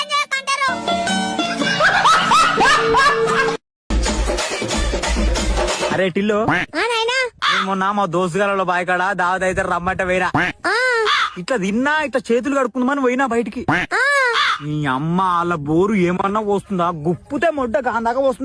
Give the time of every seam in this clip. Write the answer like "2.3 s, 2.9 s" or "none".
3.8 s

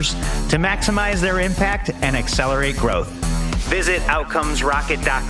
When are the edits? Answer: none

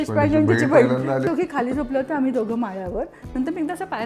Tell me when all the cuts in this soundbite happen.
1.3 s

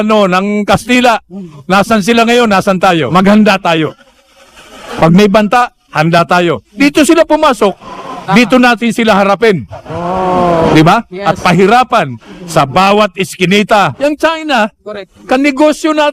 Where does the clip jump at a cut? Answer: 3.1 s, 6.7 s, 13.9 s

